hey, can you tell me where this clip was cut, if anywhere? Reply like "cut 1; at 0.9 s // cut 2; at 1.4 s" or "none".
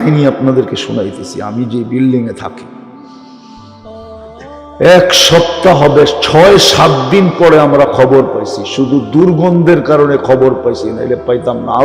cut 1; at 2.5 s // cut 2; at 4.8 s